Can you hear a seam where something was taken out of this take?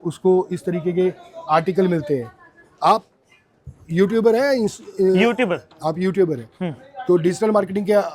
no; 0 cuts

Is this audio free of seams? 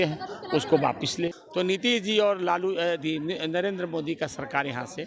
no; 1 cut; at 1.4 s

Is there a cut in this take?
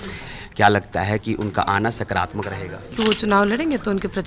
yes; 1 cut; at 2.9 s

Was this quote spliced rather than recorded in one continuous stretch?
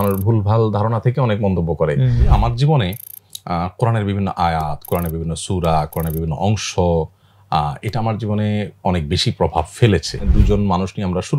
yes; 2 cuts; at 2.3 s, 10.2 s

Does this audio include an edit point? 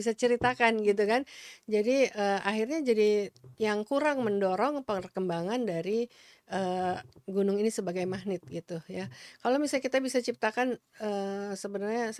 no; 0 cuts

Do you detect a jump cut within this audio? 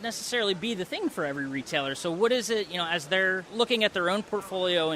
yes; 1 cut; at 3.5 s

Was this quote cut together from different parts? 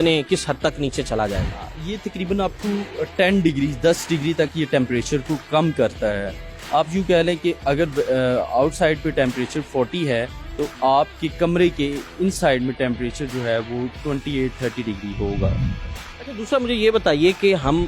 no; 0 cuts

